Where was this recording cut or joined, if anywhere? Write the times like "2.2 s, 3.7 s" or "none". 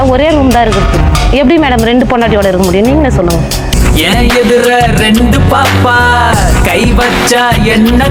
none

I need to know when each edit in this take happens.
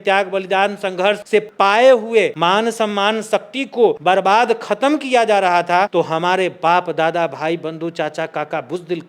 1.4 s, 2.3 s, 4.0 s, 5.9 s

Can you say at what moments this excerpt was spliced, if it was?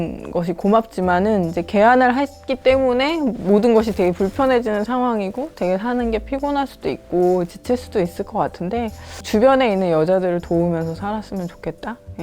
9.3 s

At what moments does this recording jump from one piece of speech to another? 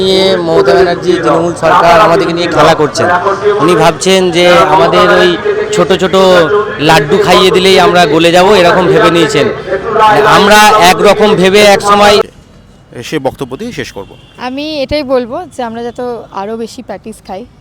12.3 s

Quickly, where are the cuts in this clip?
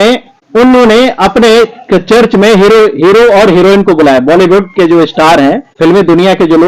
5.7 s

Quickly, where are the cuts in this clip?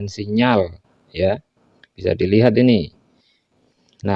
none

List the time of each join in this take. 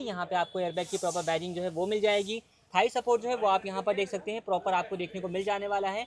none

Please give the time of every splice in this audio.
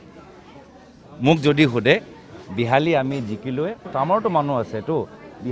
none

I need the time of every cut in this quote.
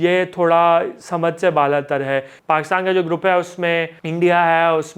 2.3 s, 4.0 s

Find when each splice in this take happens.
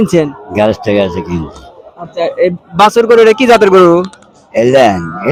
none

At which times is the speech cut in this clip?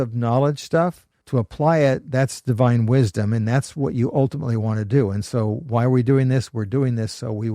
1.1 s

